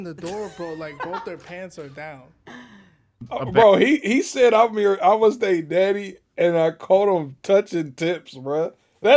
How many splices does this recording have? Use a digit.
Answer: 1